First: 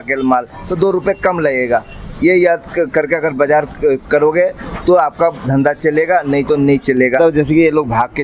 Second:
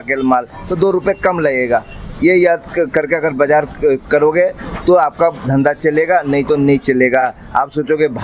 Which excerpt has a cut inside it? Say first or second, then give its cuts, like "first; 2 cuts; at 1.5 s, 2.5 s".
first; 1 cut; at 7.2 s